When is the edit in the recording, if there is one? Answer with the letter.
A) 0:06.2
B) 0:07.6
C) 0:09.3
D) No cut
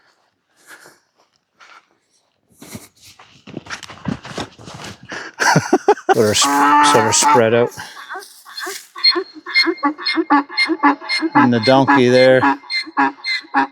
A